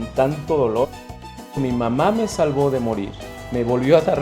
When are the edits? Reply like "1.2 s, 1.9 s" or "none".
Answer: 1.5 s

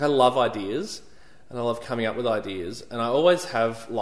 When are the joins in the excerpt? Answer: none

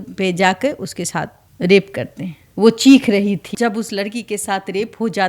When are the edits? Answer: 2.4 s, 3.5 s

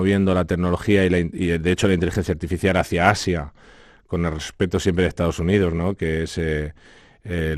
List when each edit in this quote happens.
none

